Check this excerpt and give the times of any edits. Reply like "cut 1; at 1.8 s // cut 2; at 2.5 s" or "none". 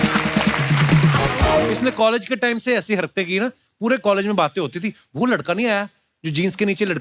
cut 1; at 1.7 s